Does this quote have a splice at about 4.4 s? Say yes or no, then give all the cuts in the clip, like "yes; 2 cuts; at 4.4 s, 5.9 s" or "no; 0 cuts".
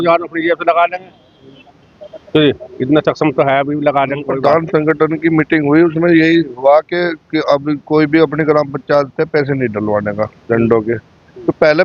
yes; 1 cut; at 4.4 s